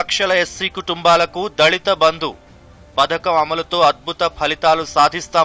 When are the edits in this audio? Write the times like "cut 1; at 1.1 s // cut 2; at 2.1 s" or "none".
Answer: none